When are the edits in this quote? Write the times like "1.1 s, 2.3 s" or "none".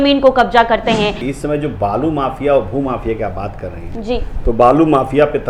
1.2 s